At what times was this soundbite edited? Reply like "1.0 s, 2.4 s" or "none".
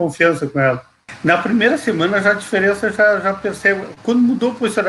1.1 s